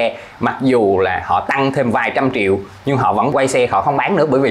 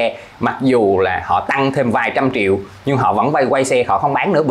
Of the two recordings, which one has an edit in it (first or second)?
first